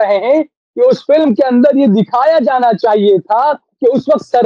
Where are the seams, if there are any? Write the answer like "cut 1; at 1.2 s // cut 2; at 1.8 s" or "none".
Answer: none